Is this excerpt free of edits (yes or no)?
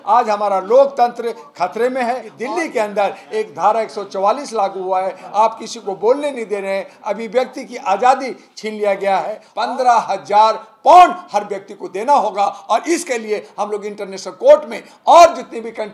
no